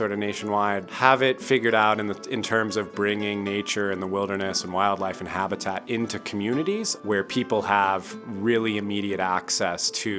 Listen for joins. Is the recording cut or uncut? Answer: cut